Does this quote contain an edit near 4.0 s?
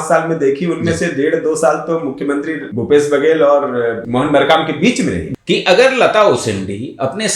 yes; 3 cuts; at 2.6 s, 4.0 s, 5.3 s

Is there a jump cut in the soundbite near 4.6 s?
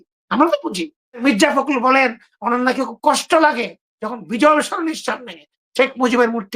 no; 1 cut; at 1.2 s

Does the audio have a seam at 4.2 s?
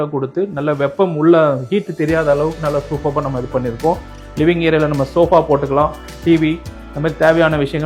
no; 0 cuts

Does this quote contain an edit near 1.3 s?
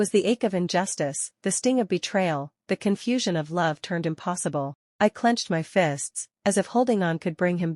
no; 1 cut; at 4.8 s

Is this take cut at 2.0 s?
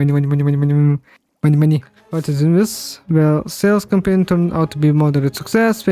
yes; 1 cut; at 2.0 s

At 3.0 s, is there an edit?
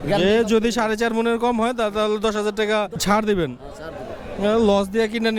yes; 1 cut; at 3.0 s

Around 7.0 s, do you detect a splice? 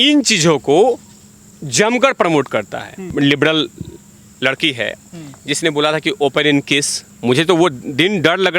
yes; 2 cuts; at 3.1 s, 7.0 s

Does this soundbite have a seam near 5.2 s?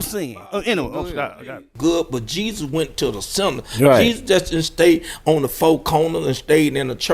no; 1 cut; at 1.7 s

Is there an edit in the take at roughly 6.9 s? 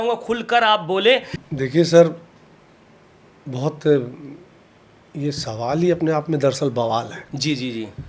no; 1 cut; at 1.4 s

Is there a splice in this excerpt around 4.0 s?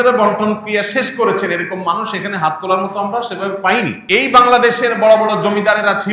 yes; 1 cut; at 4.0 s

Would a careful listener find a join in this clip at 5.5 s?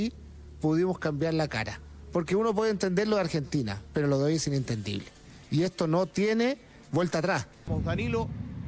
no; 1 cut; at 7.7 s

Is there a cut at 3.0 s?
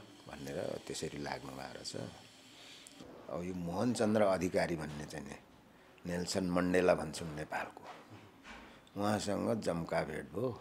yes; 1 cut; at 3.0 s

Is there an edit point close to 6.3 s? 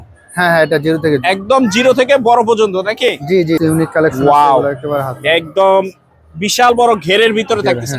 no; 1 cut; at 3.6 s

